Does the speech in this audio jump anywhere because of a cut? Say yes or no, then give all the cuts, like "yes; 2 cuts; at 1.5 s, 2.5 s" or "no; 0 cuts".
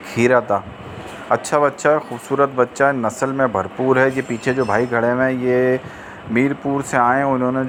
no; 0 cuts